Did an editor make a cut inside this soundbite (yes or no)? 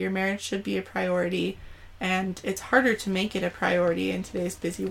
no